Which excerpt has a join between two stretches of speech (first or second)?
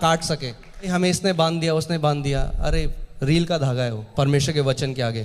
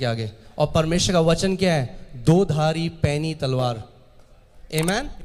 first